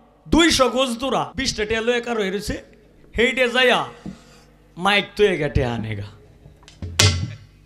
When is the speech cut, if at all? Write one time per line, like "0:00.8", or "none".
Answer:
0:01.3